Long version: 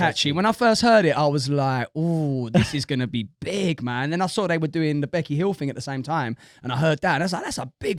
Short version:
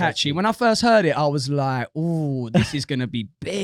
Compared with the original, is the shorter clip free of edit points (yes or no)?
yes